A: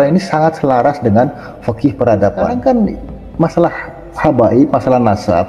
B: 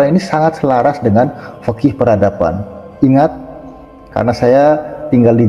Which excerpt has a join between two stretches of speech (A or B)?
A